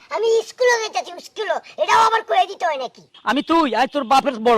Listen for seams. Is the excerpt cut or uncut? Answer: cut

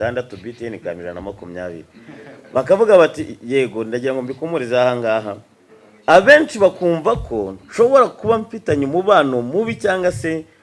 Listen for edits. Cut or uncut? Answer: uncut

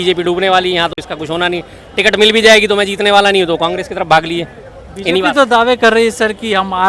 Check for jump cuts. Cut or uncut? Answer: uncut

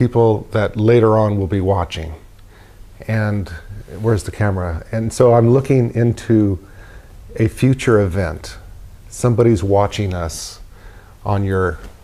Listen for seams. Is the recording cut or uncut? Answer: cut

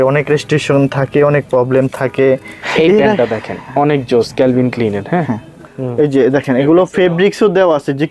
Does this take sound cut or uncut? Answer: cut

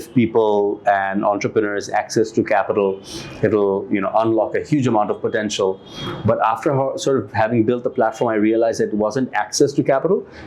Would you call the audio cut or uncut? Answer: uncut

